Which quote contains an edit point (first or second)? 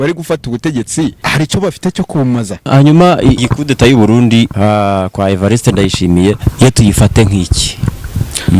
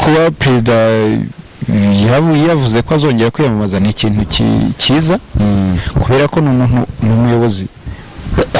first